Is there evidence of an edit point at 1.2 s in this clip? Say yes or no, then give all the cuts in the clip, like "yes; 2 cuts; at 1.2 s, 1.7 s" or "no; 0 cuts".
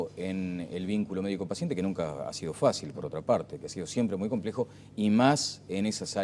no; 1 cut; at 3.7 s